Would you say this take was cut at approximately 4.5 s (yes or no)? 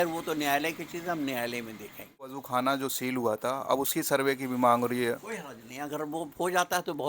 no